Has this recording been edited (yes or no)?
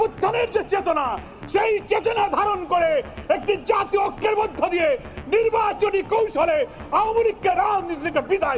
no